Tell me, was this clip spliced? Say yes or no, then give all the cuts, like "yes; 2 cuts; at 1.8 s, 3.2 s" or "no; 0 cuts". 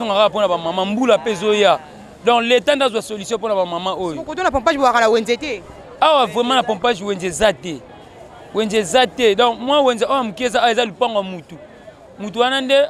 no; 0 cuts